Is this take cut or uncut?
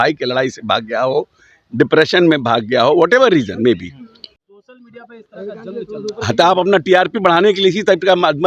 cut